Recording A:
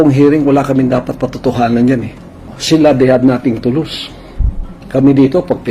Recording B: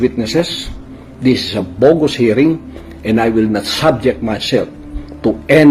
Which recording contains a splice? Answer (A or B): A